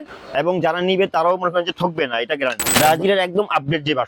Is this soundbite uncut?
no; 1 cut; at 2.8 s

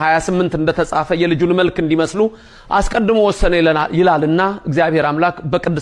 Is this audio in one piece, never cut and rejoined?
yes; 0 cuts

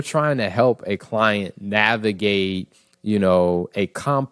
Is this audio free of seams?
yes; 0 cuts

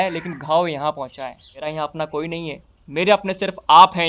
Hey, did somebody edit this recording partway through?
yes; 1 cut; at 1.5 s

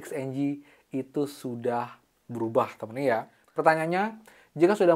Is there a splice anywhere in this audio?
yes; 1 cut; at 3.4 s

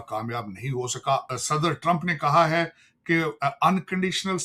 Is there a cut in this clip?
yes; 1 cut; at 1.2 s

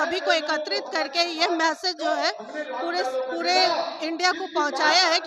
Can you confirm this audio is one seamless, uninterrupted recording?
yes; 0 cuts

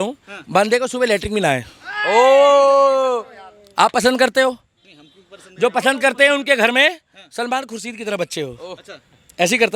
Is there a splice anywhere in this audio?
no; 0 cuts

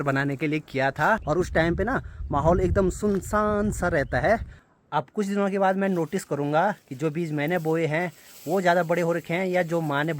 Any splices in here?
yes; 2 cuts; at 1.2 s, 4.6 s

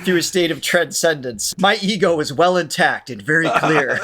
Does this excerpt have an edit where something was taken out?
yes; 1 cut; at 1.5 s

